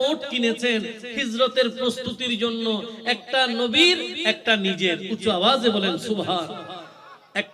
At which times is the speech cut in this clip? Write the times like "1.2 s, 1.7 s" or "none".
none